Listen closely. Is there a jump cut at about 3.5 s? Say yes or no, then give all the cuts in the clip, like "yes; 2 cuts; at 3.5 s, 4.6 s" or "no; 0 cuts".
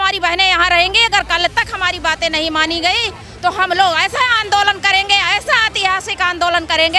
no; 0 cuts